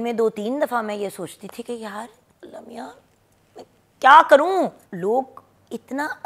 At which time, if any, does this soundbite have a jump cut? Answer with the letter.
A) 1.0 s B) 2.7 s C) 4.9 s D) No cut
C